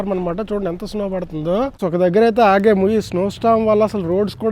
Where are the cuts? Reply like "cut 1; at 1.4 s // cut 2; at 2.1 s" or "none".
cut 1; at 1.8 s